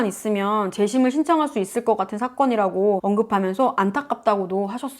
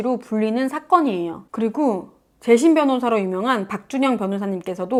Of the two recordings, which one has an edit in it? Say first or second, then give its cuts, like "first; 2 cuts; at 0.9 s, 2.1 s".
first; 1 cut; at 3.0 s